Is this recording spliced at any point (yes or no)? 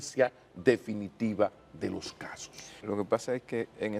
yes